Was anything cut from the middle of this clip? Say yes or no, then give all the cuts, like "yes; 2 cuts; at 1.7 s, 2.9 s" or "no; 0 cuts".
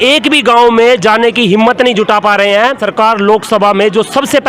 yes; 1 cut; at 2.8 s